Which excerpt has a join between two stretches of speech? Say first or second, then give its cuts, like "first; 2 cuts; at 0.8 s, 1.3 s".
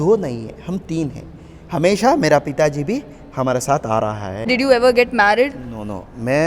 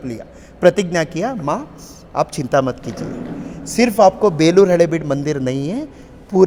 first; 1 cut; at 4.5 s